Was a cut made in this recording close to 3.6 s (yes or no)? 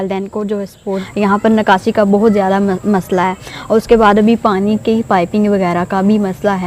no